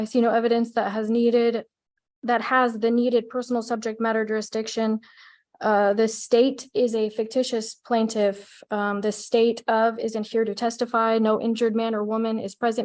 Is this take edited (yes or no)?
no